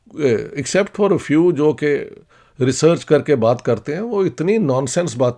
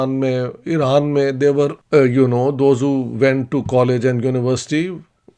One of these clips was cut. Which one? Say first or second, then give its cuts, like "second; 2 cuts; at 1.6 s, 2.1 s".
second; 1 cut; at 1.7 s